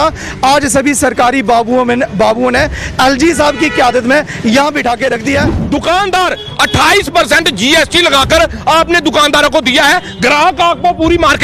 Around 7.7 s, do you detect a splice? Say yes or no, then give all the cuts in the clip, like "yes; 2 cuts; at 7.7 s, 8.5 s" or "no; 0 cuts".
no; 1 cut; at 5.6 s